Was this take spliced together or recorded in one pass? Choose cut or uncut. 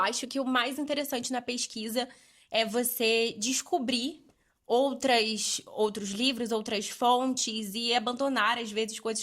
uncut